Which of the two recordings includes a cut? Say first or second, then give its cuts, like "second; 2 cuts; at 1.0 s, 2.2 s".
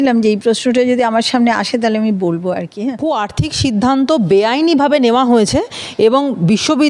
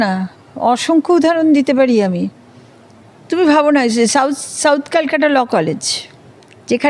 first; 1 cut; at 3.0 s